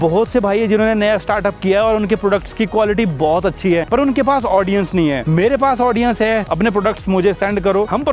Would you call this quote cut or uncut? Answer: uncut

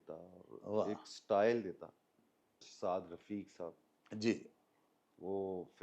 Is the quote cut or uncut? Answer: cut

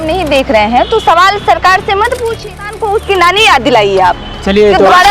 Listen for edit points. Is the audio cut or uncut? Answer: cut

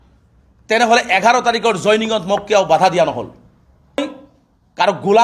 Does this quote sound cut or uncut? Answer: cut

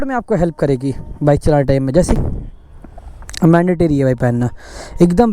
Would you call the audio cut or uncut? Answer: cut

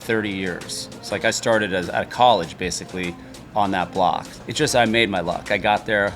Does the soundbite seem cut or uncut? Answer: cut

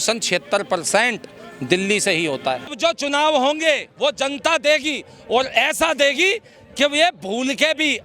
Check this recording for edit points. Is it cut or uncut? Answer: cut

